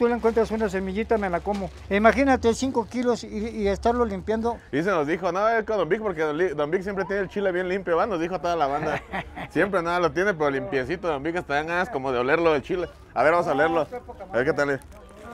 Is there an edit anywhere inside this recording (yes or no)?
yes